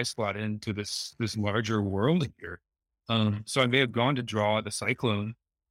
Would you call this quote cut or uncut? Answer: uncut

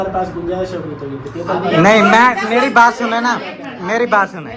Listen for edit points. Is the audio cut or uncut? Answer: uncut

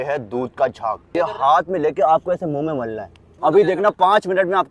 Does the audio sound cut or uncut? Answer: cut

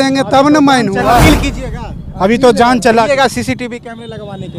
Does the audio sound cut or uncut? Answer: uncut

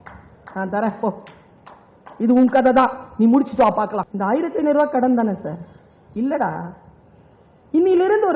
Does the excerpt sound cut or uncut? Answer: cut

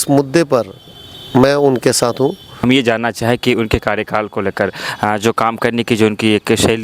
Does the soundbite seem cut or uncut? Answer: cut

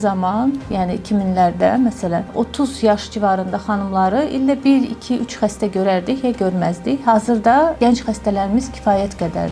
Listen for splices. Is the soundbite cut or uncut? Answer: uncut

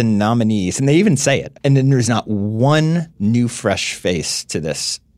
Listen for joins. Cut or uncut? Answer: cut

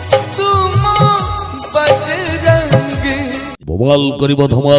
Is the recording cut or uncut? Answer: cut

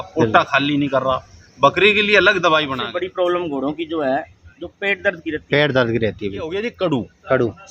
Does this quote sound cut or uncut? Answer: cut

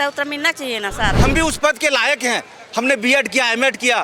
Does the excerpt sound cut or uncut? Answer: cut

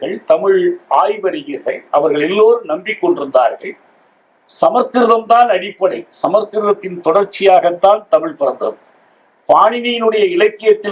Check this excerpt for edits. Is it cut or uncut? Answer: uncut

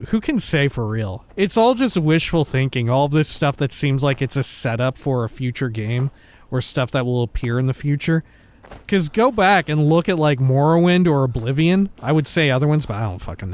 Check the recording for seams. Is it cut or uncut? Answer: cut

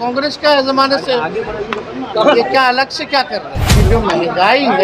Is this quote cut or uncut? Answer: cut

